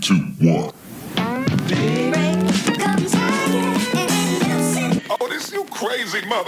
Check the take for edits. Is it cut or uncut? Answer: uncut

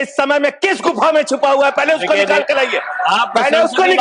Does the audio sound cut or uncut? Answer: uncut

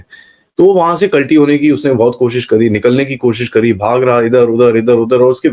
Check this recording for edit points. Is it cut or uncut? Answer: uncut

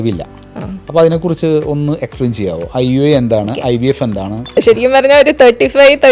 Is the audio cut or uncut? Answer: cut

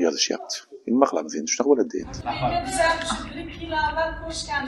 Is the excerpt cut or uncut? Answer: cut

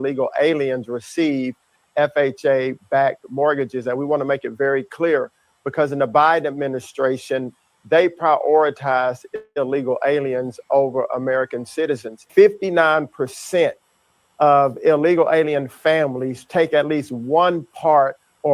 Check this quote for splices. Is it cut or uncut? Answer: cut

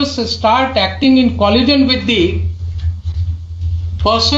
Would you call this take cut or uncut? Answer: uncut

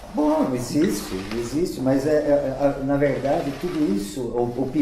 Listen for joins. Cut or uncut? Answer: uncut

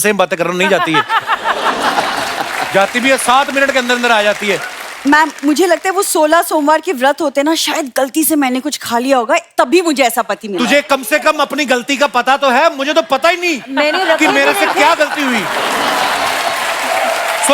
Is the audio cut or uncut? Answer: uncut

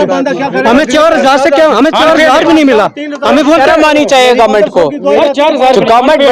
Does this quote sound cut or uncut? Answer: uncut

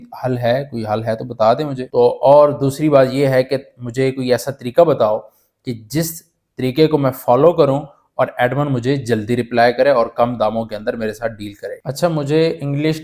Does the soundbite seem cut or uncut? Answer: cut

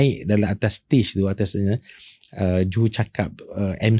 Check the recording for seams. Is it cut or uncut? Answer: uncut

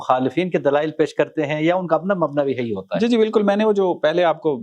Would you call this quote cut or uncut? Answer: uncut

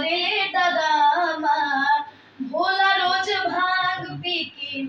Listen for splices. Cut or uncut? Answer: uncut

